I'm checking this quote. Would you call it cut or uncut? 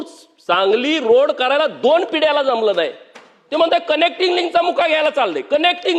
uncut